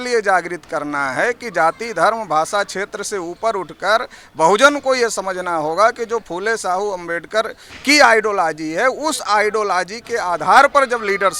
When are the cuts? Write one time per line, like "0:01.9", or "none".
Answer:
none